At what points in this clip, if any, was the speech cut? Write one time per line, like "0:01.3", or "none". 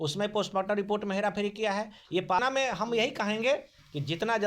0:02.4